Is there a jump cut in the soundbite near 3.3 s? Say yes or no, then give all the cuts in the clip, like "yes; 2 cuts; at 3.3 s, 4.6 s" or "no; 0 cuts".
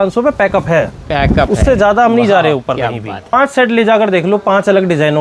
yes; 1 cut; at 3.3 s